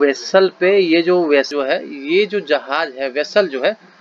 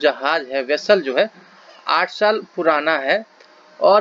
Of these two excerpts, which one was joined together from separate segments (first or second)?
first